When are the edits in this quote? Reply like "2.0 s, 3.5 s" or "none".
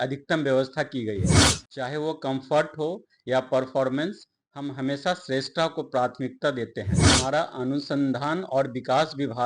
7.0 s